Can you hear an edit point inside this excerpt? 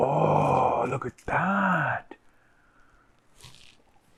no; 0 cuts

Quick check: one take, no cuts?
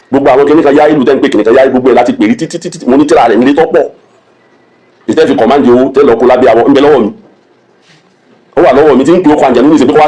yes; 0 cuts

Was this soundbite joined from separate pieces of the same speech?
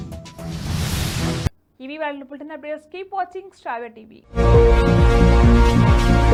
no; 0 cuts

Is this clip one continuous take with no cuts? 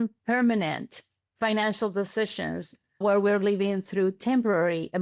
yes; 0 cuts

